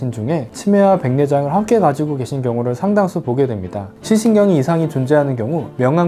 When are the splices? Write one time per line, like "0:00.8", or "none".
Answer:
0:03.8